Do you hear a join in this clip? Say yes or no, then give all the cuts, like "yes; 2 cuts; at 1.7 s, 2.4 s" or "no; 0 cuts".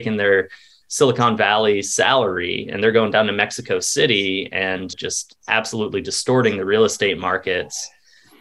no; 0 cuts